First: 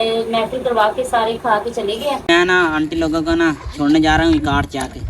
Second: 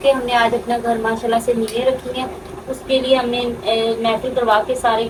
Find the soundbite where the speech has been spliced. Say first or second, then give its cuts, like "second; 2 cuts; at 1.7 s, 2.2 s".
first; 1 cut; at 2.4 s